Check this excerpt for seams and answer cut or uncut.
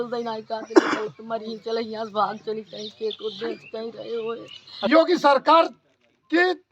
cut